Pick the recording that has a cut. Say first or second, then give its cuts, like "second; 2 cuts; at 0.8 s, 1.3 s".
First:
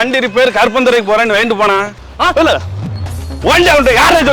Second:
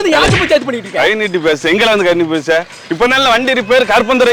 first; 1 cut; at 2.0 s